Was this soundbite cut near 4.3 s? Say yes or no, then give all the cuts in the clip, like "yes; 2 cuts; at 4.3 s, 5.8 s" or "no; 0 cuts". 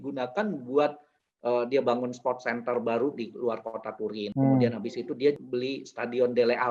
yes; 2 cuts; at 4.3 s, 5.4 s